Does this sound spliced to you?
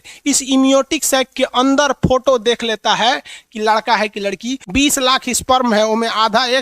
yes; 1 cut; at 4.6 s

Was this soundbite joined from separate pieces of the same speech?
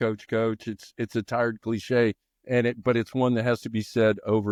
no; 0 cuts

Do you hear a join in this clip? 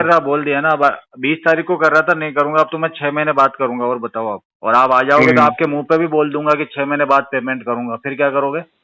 yes; 1 cut; at 4.5 s

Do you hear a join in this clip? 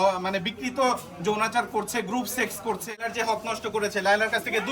yes; 1 cut; at 3.1 s

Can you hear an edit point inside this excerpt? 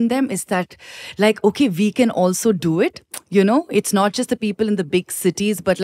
no; 0 cuts

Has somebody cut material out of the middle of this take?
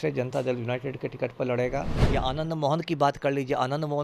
yes; 1 cut; at 2.0 s

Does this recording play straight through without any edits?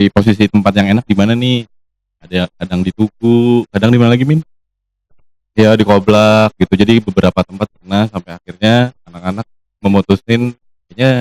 yes; 0 cuts

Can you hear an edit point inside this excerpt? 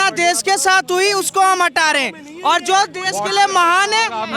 no; 0 cuts

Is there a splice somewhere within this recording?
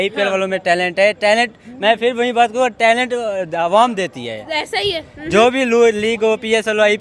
no; 0 cuts

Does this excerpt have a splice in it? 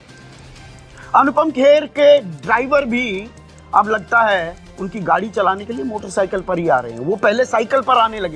yes; 1 cut; at 1.1 s

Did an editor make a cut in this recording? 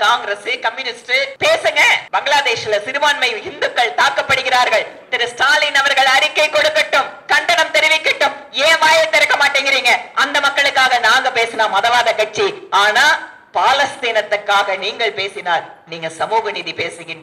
yes; 2 cuts; at 1.3 s, 2.0 s

